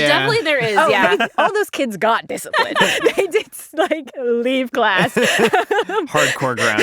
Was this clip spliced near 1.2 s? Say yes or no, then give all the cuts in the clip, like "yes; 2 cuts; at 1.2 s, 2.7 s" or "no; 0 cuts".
no; 1 cut; at 2.7 s